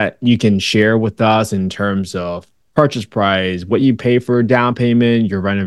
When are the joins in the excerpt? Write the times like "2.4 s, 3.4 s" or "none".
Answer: none